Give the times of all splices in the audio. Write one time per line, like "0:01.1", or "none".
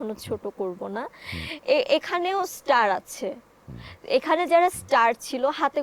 none